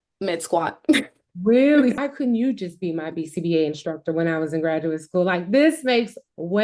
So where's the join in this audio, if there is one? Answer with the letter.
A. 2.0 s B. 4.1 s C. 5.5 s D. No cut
A